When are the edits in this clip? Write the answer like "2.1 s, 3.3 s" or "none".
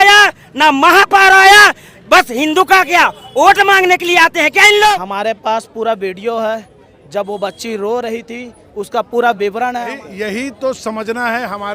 5.0 s, 10.0 s

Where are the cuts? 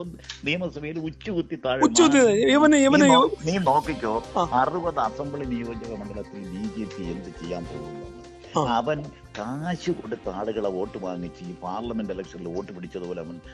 2.5 s

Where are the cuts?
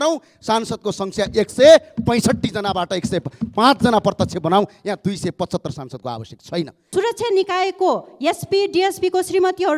6.8 s

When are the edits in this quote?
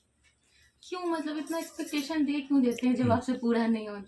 none

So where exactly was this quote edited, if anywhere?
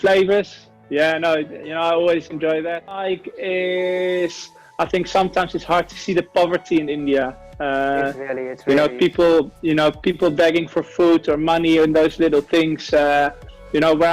3.2 s

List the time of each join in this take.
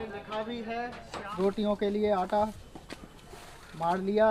1.2 s

